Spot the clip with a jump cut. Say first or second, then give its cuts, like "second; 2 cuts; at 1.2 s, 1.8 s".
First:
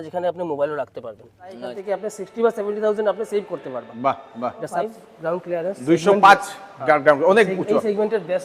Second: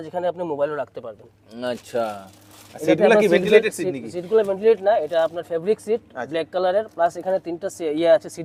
first; 2 cuts; at 1.7 s, 4.9 s